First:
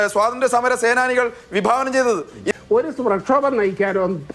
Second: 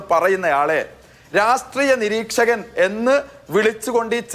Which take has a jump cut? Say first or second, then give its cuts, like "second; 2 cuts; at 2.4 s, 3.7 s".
first; 1 cut; at 2.4 s